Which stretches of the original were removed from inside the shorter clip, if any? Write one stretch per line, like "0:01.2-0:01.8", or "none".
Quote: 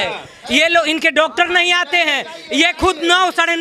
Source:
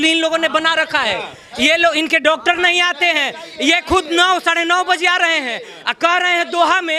none